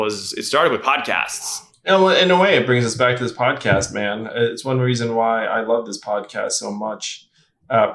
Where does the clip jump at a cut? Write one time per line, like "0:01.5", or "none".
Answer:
0:01.7